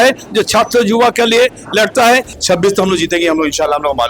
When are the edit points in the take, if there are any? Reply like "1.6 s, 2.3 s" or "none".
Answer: 2.3 s